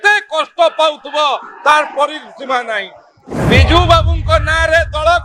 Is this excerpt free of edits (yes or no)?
no